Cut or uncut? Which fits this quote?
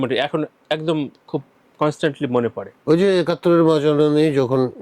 cut